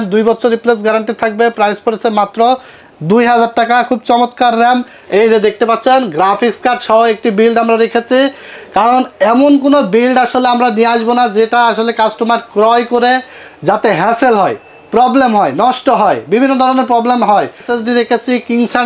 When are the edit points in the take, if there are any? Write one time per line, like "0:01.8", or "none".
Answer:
0:04.9
0:17.7